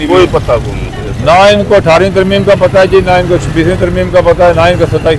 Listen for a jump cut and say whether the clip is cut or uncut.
uncut